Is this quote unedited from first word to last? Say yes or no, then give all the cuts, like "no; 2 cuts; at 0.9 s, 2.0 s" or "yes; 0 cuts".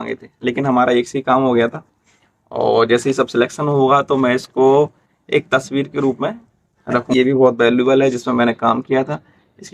no; 1 cut; at 7.1 s